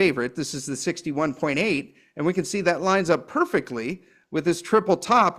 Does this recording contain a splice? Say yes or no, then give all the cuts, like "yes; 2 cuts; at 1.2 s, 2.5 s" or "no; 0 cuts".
no; 0 cuts